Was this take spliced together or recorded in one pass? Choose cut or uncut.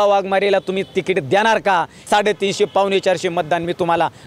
cut